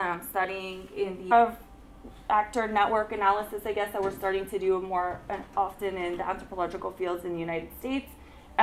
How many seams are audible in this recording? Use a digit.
0